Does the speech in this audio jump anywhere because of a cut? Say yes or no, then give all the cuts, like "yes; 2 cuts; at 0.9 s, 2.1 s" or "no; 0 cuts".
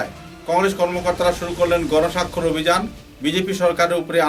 no; 0 cuts